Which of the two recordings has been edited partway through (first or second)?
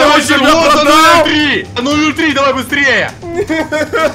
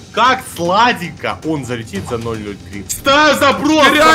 second